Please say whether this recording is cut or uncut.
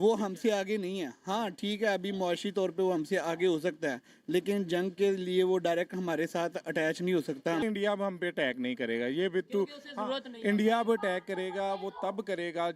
cut